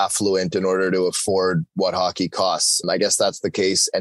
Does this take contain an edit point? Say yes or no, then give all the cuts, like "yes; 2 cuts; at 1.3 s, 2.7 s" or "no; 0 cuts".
yes; 1 cut; at 2.8 s